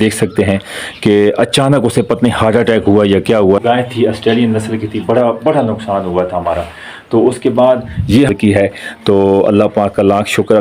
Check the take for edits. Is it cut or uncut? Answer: cut